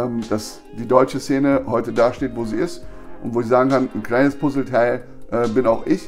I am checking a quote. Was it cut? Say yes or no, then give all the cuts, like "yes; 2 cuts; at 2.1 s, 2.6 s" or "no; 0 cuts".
no; 0 cuts